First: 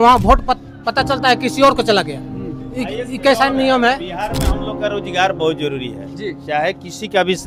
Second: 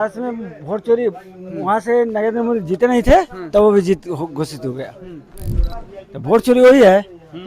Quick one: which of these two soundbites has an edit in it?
second; 1 cut; at 5.7 s

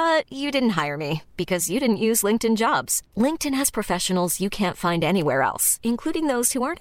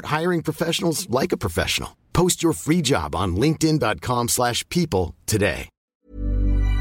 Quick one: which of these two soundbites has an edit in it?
second; 1 cut; at 5.8 s

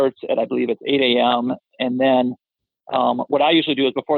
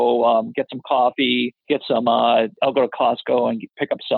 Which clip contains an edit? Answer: second; 2 cuts; at 1.6 s, 2.6 s

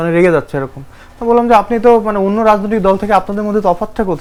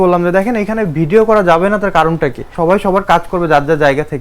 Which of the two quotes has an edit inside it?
second; 1 cut; at 2.5 s

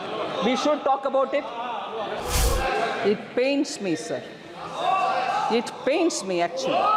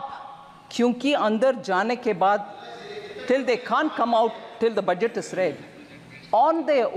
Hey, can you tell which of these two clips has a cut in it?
first; 1 cut; at 2.2 s

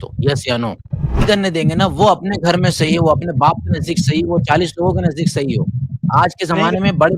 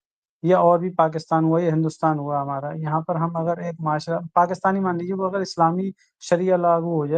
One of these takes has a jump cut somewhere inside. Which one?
first; 1 cut; at 1.2 s

